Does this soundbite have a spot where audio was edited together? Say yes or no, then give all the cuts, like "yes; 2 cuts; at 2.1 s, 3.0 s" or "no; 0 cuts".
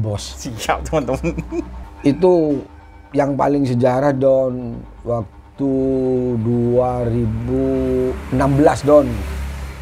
yes; 1 cut; at 1.8 s